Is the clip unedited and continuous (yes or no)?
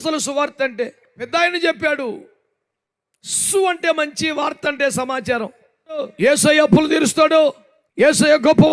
no